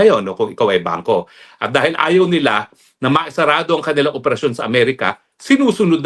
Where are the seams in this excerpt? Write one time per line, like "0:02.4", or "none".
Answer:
none